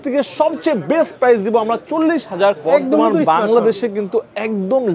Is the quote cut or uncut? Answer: cut